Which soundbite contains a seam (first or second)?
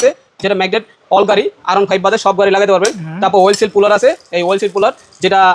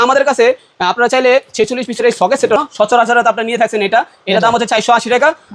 second